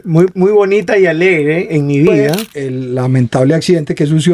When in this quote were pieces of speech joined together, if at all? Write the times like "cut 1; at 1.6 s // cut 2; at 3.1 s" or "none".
cut 1; at 2.5 s